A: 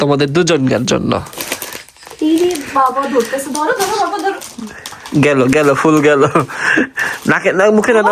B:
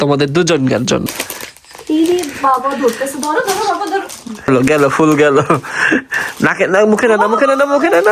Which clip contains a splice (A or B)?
B